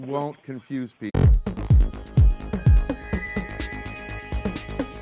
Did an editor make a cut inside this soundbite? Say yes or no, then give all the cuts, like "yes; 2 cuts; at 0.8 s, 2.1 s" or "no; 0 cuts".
no; 0 cuts